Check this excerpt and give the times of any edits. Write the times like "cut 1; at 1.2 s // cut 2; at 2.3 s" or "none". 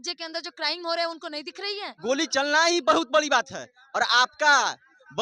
cut 1; at 1.9 s